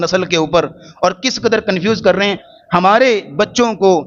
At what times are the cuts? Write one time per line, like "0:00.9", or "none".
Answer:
0:02.4